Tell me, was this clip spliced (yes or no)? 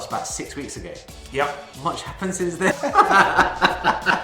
yes